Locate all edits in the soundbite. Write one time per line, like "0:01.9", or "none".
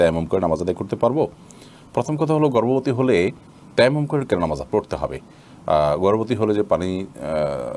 none